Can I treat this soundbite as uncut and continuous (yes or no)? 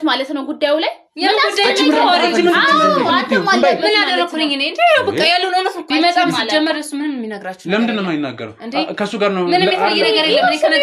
no